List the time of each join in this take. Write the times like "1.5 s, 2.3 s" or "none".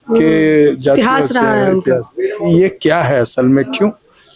2.5 s